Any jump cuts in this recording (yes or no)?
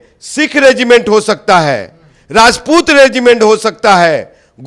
no